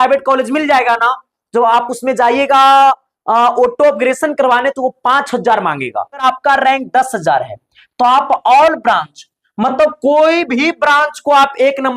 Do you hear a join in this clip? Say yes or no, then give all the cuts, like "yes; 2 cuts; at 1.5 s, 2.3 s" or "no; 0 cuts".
yes; 1 cut; at 6.2 s